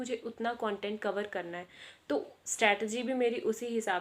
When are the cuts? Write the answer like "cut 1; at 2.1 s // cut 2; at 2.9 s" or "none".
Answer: none